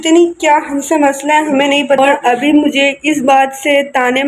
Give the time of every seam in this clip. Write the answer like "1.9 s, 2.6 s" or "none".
2.0 s